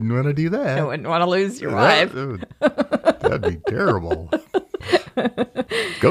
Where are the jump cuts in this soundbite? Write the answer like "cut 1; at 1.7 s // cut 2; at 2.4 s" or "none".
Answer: cut 1; at 4.8 s